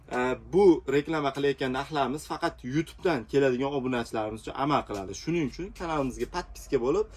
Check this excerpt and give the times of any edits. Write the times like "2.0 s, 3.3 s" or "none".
none